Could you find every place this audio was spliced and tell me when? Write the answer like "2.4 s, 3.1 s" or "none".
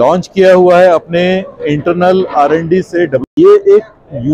3.3 s

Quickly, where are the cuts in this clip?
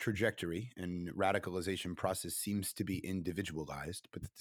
none

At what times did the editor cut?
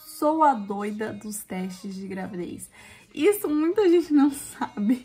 none

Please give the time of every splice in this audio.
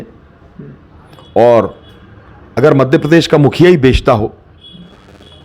none

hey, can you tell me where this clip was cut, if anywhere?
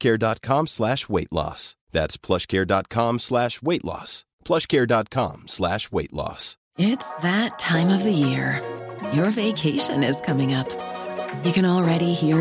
6.6 s

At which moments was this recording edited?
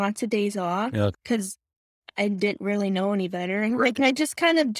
1.1 s

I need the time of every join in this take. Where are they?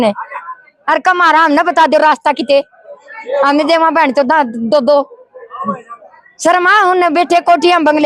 none

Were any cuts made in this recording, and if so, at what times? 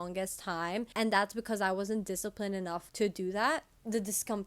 0.9 s, 2.8 s, 3.7 s

